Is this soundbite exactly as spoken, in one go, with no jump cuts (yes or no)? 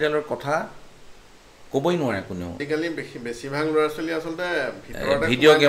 no